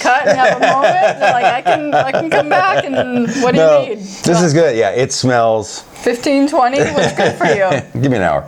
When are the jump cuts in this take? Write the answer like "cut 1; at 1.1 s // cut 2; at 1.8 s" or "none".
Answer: none